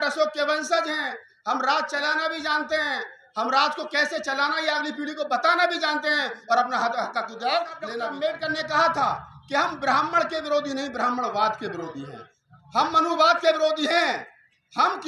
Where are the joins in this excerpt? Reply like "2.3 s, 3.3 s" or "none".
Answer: 8.0 s